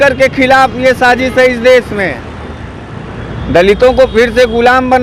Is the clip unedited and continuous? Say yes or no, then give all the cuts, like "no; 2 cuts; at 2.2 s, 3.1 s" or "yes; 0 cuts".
yes; 0 cuts